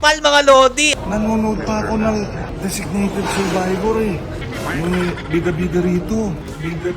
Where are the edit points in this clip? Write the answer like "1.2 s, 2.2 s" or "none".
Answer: 0.8 s, 2.5 s, 4.4 s